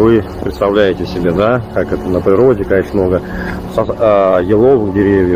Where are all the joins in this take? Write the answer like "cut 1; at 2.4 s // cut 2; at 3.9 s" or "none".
none